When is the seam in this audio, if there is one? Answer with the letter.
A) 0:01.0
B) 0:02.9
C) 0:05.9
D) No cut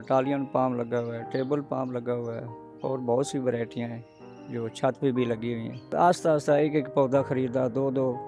C